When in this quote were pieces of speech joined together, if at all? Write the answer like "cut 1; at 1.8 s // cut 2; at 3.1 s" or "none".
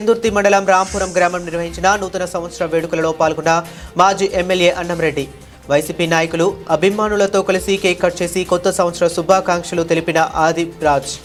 none

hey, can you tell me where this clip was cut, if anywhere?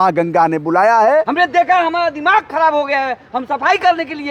cut 1; at 1.3 s

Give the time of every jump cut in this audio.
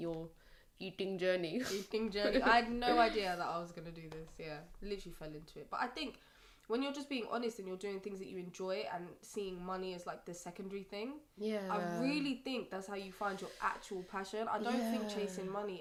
none

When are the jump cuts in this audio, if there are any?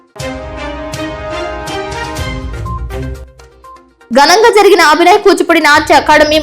cut 1; at 3.1 s

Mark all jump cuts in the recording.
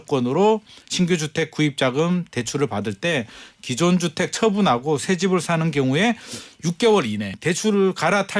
cut 1; at 7.3 s

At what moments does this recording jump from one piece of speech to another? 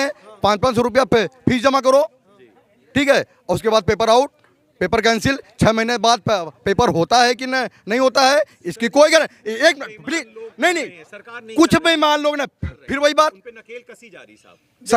none

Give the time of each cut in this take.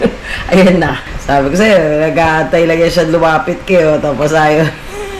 cut 1; at 1.1 s

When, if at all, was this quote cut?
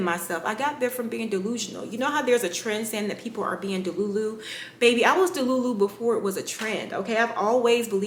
none

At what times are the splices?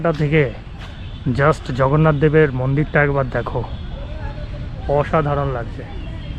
none

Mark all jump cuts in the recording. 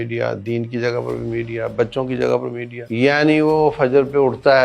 cut 1; at 2.7 s

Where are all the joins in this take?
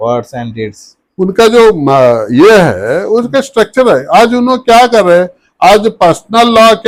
none

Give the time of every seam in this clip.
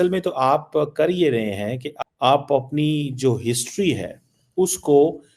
cut 1; at 1.9 s

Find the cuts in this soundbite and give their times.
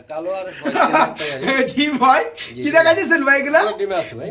none

